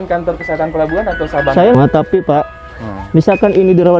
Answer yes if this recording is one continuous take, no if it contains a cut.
no